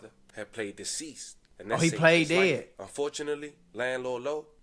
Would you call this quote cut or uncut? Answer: uncut